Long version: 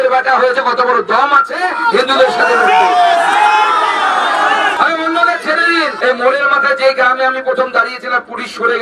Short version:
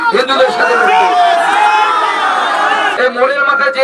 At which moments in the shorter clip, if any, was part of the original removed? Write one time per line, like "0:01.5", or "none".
0:02.9